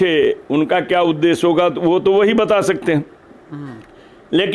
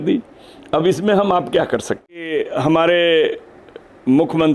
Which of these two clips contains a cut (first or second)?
second